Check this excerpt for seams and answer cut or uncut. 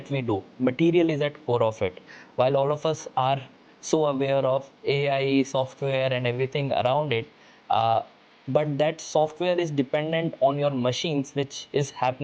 uncut